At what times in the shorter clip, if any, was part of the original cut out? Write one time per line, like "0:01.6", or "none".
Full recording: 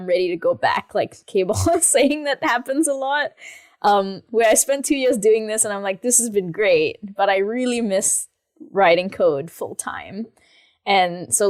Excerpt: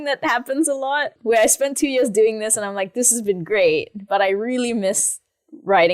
0:01.1